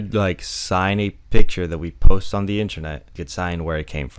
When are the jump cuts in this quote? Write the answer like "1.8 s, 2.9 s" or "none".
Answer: 3.2 s